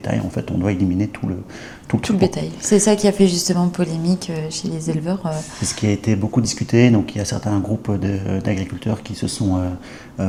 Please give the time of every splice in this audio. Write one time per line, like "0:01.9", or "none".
none